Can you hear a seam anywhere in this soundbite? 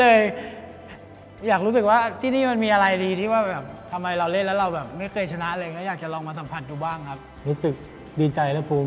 yes; 1 cut; at 7.3 s

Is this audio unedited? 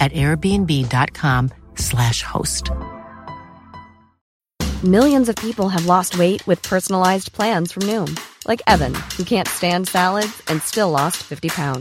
yes; 0 cuts

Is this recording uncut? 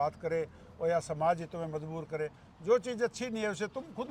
yes; 0 cuts

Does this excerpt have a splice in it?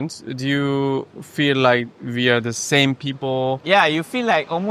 yes; 1 cut; at 3.6 s

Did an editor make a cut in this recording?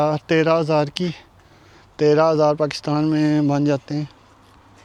no; 0 cuts

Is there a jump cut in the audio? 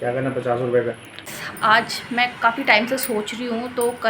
yes; 1 cut; at 1.2 s

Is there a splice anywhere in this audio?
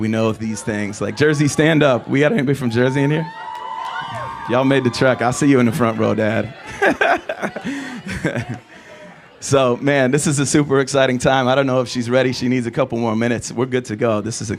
no; 0 cuts

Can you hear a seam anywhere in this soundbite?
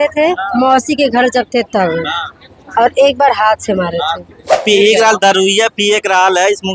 yes; 1 cut; at 4.6 s

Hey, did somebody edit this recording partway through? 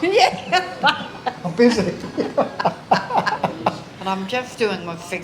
yes; 1 cut; at 3.9 s

